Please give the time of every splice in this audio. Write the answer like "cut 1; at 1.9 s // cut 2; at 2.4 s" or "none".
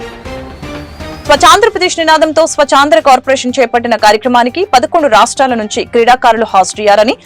cut 1; at 1.0 s

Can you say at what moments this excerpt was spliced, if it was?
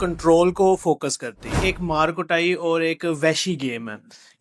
cut 1; at 1.6 s

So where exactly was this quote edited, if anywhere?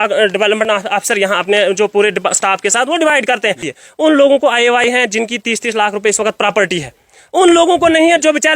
cut 1; at 3.7 s

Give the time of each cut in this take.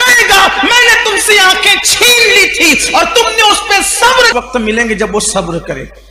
cut 1; at 4.3 s

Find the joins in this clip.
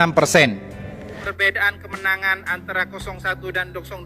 cut 1; at 1.2 s

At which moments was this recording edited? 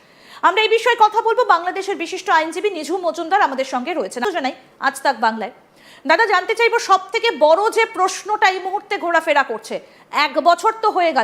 cut 1; at 4.2 s

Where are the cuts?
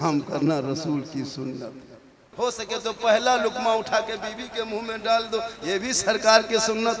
cut 1; at 2.2 s

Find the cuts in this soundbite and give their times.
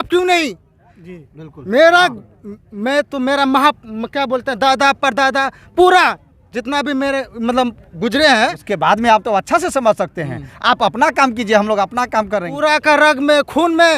cut 1; at 8.7 s // cut 2; at 12.5 s

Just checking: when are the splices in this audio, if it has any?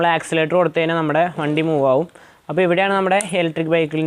none

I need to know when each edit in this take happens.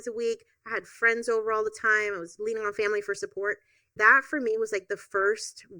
cut 1; at 3.9 s

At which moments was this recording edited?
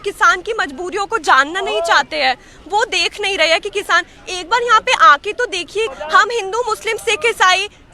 cut 1; at 5.9 s

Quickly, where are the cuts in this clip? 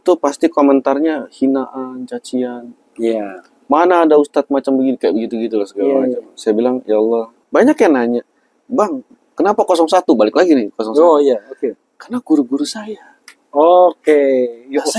cut 1; at 7.3 s

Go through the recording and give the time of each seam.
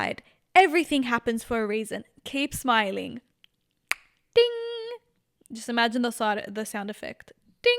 none

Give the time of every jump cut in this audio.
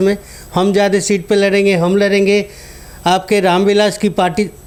none

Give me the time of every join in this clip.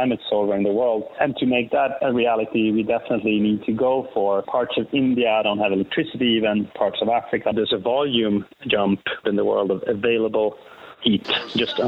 cut 1; at 4.4 s // cut 2; at 7.5 s // cut 3; at 9.2 s

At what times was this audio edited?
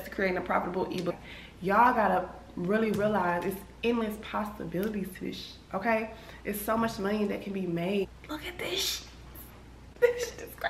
cut 1; at 1.1 s // cut 2; at 8.0 s

